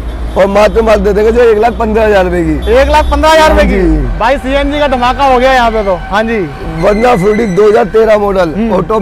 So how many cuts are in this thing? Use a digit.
0